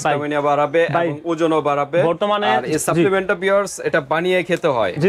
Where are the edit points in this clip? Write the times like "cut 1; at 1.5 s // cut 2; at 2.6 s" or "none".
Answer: cut 1; at 2.4 s